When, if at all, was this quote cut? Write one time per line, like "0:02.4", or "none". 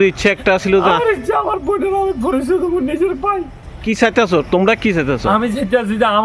0:03.8